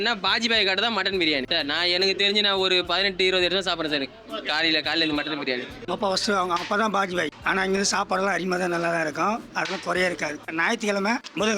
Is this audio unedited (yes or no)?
yes